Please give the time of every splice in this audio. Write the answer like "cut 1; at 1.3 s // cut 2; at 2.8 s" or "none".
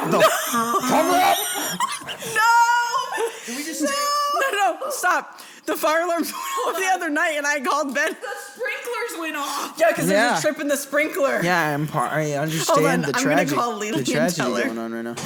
none

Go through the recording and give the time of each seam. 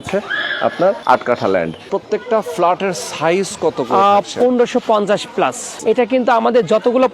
cut 1; at 1.0 s // cut 2; at 1.9 s // cut 3; at 5.7 s

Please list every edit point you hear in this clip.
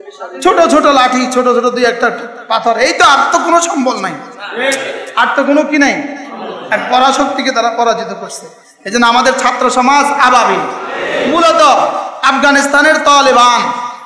cut 1; at 11.0 s

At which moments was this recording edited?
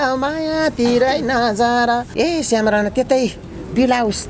cut 1; at 2.1 s

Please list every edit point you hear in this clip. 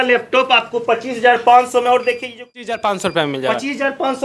cut 1; at 2.6 s

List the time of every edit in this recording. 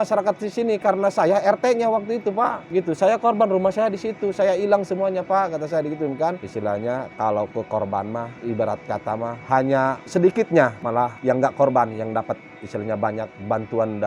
cut 1; at 6.4 s

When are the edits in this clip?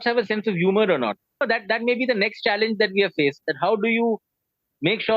cut 1; at 1.4 s

